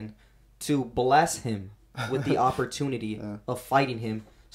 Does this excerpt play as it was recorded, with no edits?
yes; 0 cuts

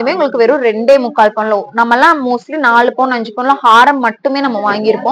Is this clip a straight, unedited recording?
yes; 0 cuts

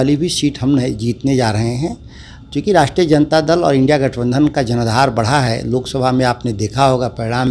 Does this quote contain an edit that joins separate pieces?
no; 0 cuts

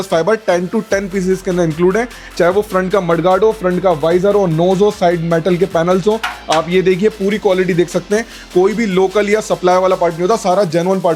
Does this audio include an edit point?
no; 0 cuts

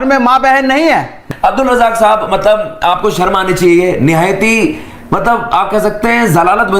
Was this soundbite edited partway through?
yes; 1 cut; at 1.2 s

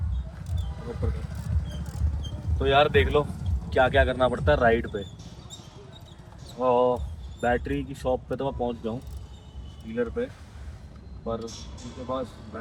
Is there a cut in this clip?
no; 0 cuts

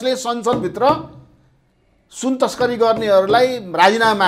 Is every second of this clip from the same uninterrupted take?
yes; 0 cuts

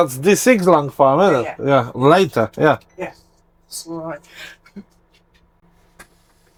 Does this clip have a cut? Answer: no; 0 cuts

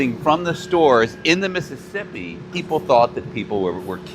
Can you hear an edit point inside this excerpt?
yes; 1 cut; at 2.5 s

